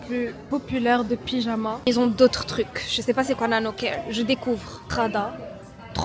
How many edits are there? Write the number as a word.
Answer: two